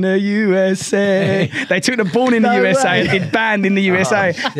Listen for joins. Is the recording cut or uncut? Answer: uncut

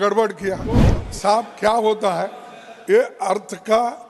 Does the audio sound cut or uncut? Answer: cut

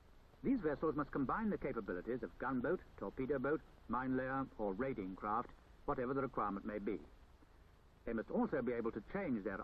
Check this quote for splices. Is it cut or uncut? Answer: uncut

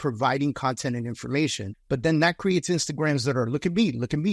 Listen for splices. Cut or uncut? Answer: uncut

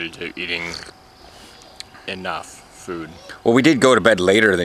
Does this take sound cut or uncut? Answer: cut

